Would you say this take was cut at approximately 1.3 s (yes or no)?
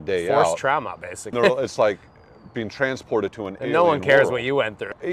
yes